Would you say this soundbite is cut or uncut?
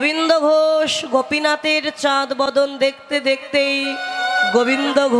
uncut